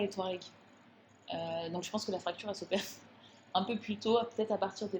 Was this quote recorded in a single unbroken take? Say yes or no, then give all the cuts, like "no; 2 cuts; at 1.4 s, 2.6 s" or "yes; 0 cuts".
yes; 0 cuts